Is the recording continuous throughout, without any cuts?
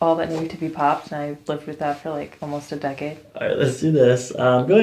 yes; 0 cuts

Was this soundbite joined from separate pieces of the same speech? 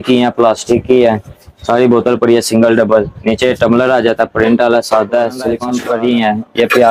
yes; 1 cut; at 5.7 s

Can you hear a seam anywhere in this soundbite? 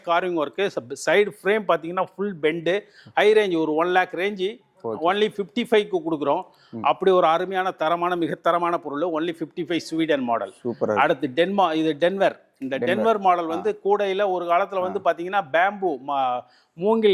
no; 0 cuts

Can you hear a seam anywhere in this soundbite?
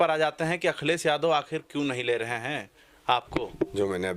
no; 0 cuts

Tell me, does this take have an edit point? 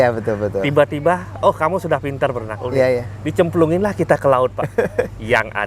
no; 0 cuts

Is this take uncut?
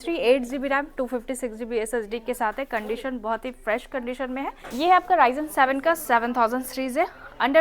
no; 1 cut; at 4.6 s

